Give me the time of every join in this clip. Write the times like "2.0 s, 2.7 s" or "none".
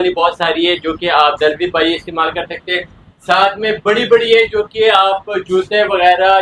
none